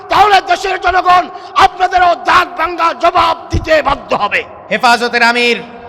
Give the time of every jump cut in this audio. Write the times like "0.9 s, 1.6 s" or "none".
4.5 s